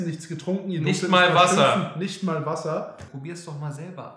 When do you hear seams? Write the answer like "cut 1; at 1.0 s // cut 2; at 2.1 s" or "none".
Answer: cut 1; at 3.1 s